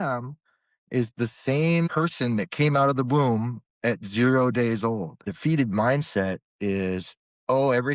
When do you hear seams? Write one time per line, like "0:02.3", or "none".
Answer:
0:01.9
0:05.3